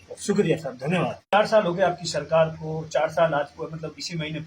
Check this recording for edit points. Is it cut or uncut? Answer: cut